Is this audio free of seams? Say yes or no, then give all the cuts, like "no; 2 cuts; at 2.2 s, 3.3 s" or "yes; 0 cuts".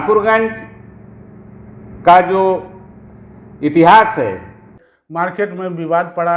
no; 1 cut; at 4.7 s